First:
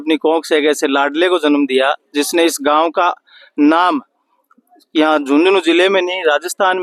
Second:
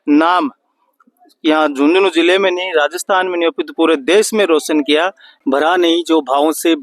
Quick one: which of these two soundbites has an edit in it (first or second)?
second